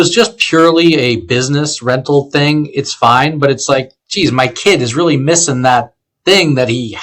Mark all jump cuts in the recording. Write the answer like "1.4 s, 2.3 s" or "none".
none